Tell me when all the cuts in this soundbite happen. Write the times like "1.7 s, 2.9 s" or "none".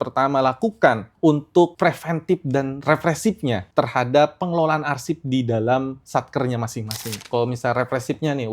1.1 s, 1.7 s, 3.6 s, 7.3 s